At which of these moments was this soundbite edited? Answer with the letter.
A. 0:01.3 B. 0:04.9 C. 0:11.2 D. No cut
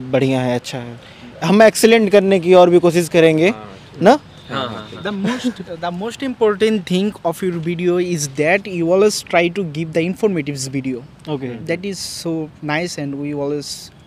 A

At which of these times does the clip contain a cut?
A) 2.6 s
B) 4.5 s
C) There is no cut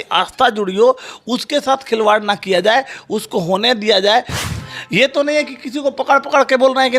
B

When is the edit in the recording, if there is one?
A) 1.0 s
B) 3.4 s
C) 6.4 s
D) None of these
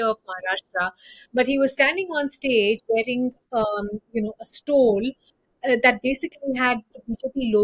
D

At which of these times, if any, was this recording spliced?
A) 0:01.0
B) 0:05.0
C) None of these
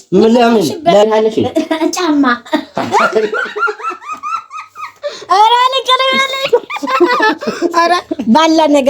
A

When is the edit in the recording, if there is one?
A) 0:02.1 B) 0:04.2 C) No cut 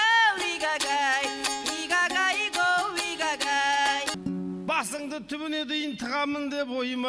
B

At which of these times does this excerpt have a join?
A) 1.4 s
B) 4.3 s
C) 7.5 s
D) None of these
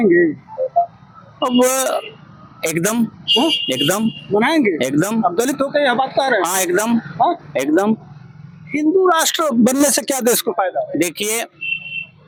D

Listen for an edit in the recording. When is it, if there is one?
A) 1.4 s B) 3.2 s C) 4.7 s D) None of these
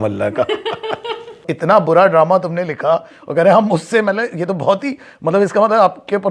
A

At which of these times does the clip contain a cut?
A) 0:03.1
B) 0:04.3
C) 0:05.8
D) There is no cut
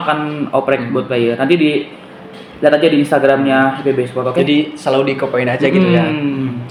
D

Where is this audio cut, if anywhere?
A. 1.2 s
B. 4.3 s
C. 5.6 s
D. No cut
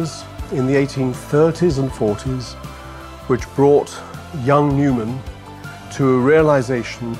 B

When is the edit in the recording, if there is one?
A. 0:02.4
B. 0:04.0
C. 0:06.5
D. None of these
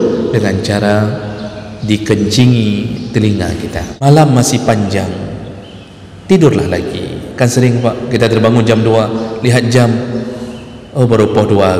B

